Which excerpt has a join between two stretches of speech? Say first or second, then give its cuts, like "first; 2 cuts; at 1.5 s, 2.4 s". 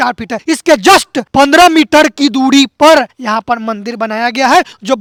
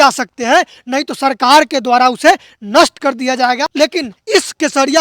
second; 1 cut; at 4.0 s